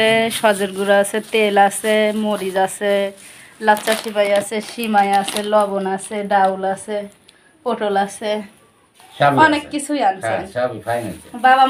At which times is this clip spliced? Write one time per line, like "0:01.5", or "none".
none